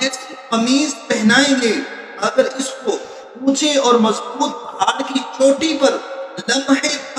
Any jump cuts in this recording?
no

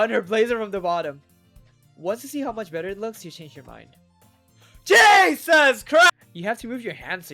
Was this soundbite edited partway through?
yes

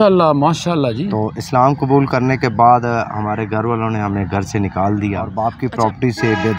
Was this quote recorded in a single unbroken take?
no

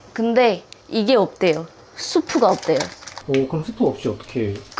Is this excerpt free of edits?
no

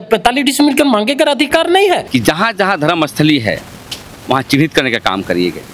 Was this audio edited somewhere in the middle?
yes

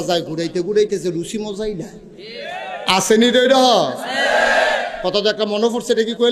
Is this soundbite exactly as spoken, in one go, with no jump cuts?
yes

